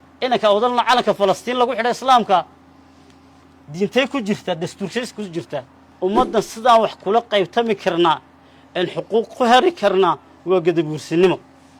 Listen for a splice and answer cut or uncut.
cut